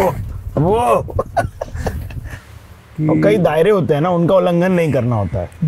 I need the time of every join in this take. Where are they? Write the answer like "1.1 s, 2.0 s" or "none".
2.2 s